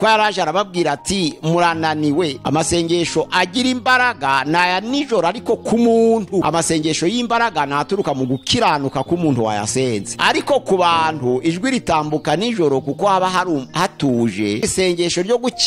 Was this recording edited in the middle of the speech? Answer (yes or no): yes